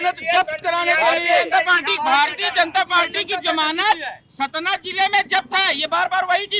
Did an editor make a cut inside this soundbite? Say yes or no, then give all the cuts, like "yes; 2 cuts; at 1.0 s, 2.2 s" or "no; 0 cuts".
no; 0 cuts